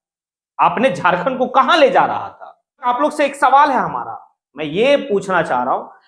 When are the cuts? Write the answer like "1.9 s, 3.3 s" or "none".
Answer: 2.9 s